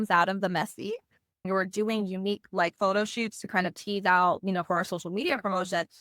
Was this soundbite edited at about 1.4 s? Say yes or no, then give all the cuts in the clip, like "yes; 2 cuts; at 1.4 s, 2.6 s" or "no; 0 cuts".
yes; 1 cut; at 1.4 s